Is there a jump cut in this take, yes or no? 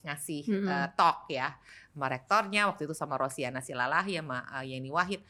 no